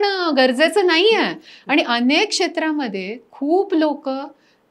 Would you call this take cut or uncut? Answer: uncut